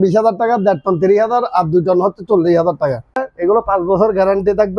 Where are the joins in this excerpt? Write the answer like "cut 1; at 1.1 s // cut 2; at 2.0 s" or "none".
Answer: cut 1; at 3.3 s